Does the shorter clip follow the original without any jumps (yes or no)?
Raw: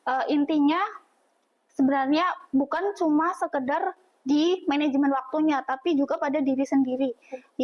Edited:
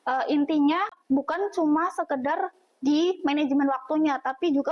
no